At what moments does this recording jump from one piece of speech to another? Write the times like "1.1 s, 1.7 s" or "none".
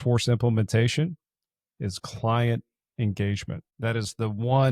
3.6 s